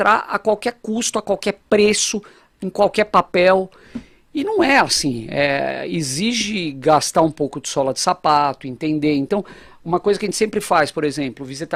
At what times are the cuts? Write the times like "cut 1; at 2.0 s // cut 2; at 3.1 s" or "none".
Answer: none

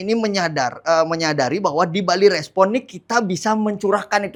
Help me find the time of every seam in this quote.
none

